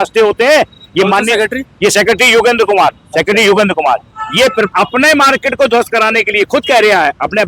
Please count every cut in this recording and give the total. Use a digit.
1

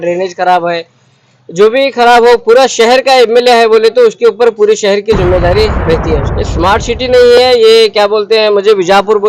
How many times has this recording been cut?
1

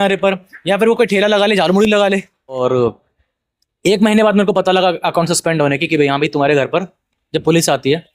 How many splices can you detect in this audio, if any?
1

